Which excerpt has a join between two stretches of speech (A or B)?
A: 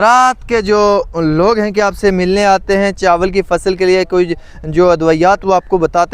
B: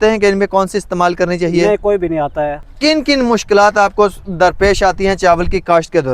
B